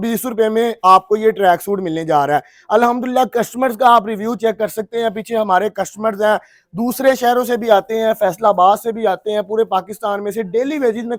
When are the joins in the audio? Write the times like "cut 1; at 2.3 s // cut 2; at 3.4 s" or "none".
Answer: none